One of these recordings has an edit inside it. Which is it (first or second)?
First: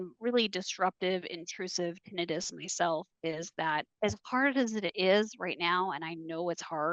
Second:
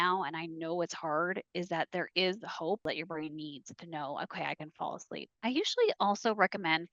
second